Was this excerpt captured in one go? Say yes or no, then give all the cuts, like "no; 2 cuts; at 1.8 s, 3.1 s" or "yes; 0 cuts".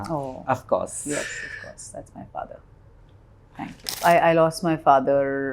no; 1 cut; at 3.9 s